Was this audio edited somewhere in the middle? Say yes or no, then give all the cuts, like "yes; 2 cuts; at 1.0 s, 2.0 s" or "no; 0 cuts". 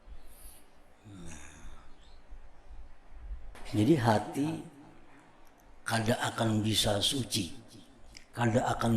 yes; 1 cut; at 3.5 s